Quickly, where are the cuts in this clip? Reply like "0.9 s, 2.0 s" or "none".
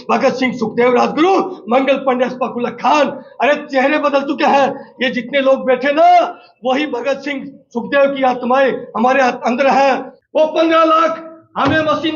10.1 s